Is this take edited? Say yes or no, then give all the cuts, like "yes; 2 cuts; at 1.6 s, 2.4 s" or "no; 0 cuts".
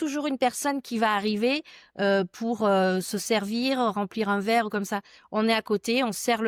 no; 0 cuts